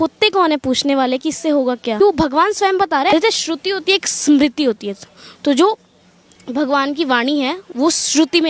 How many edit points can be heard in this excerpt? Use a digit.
2